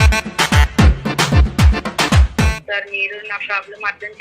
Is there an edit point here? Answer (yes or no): yes